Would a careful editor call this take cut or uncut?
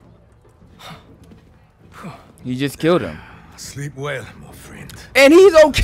uncut